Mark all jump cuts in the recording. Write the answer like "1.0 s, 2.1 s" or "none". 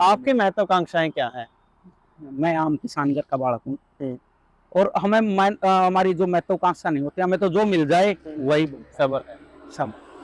none